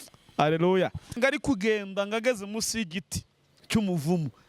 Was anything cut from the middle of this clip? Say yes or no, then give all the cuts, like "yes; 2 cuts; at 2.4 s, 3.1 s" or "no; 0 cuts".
yes; 1 cut; at 1.2 s